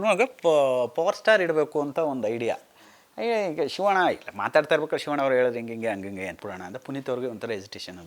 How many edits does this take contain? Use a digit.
1